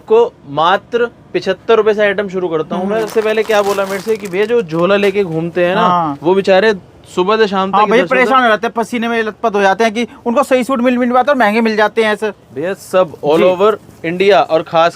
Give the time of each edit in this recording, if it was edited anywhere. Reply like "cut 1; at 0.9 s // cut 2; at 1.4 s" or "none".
cut 1; at 3.1 s // cut 2; at 12.4 s